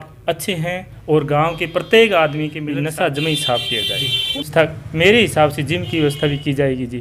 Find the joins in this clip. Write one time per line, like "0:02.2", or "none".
0:02.6
0:04.4